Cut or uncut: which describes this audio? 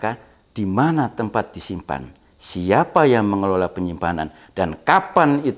uncut